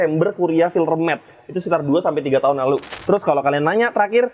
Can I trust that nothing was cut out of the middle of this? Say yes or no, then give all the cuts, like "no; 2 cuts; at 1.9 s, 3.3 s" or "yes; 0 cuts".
no; 1 cut; at 2.9 s